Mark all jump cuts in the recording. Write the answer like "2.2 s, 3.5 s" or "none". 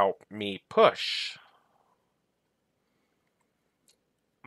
2.8 s

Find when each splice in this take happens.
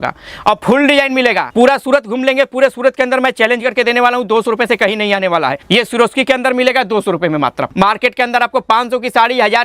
1.4 s, 5.6 s, 7.6 s

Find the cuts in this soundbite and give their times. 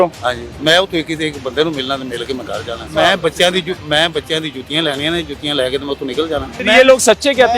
2.8 s, 6.5 s

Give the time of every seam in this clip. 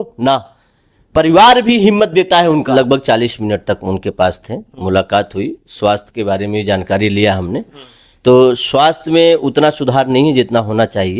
2.7 s

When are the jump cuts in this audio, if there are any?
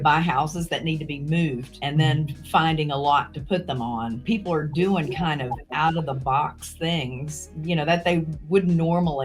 1.7 s, 4.2 s

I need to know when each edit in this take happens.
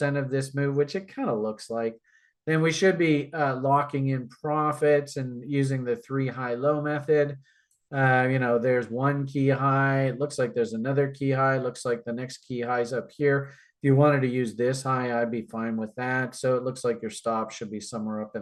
none

